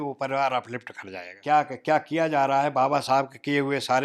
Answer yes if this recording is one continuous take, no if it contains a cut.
no